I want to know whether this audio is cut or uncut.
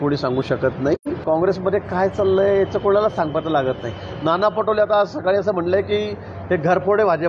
cut